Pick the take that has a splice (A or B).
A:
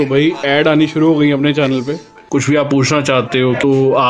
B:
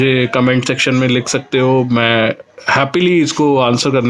A